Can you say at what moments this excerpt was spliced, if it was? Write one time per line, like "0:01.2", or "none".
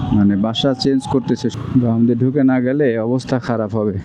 0:01.5